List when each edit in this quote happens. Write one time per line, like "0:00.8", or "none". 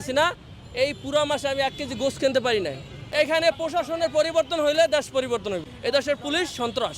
0:02.9
0:05.7